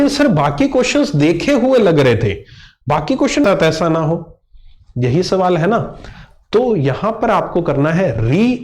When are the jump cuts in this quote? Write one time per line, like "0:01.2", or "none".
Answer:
0:03.4